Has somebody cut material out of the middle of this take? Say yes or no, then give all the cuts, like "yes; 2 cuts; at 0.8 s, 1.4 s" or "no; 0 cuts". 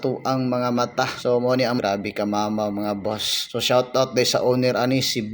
yes; 1 cut; at 1.8 s